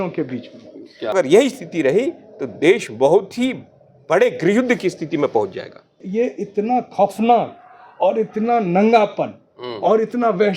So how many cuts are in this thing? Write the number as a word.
two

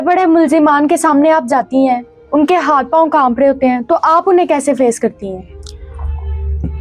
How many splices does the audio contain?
zero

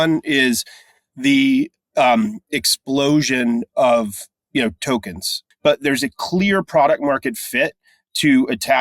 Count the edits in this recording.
one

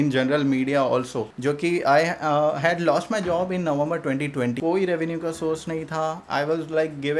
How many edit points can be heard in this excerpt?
two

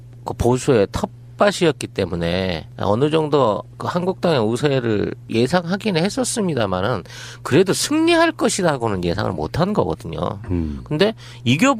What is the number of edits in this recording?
zero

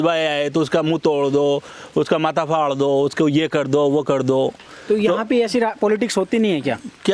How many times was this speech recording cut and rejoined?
zero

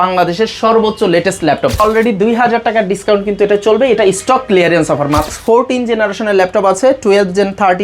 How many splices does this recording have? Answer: two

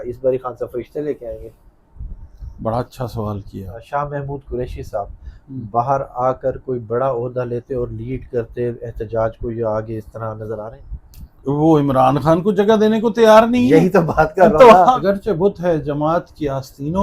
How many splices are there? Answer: three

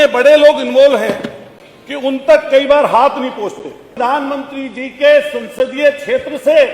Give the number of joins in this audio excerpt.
one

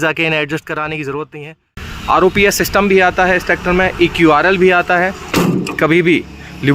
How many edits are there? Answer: two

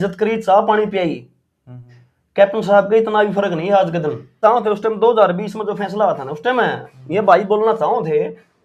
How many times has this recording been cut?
one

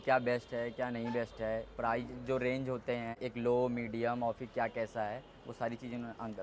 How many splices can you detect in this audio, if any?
one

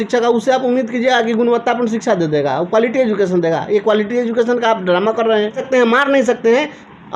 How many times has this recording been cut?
one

